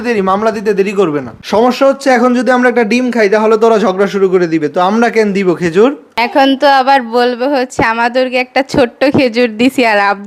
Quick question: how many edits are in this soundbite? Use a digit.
2